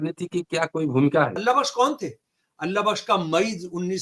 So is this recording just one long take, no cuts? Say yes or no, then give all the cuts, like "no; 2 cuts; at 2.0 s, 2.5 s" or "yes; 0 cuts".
no; 1 cut; at 1.4 s